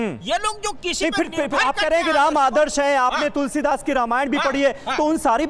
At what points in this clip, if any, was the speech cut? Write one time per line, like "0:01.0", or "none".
none